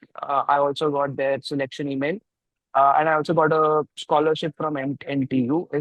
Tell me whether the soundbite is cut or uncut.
uncut